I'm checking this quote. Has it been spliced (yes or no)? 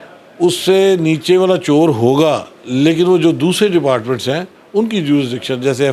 no